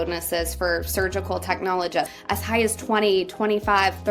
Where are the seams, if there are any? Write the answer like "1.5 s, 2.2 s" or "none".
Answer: 2.1 s